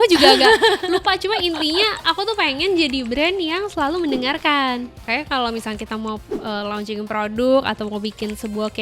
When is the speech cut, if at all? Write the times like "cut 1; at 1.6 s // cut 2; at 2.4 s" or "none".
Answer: cut 1; at 5.0 s